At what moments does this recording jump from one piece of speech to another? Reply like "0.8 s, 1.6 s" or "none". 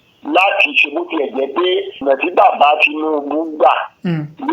2.0 s